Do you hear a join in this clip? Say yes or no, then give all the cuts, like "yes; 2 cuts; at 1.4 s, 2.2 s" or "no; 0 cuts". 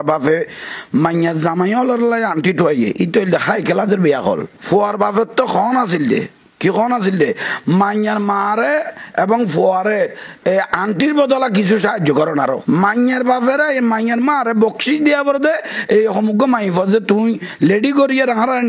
no; 0 cuts